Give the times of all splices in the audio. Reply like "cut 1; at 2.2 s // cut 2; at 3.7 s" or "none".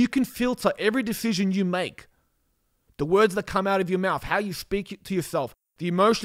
none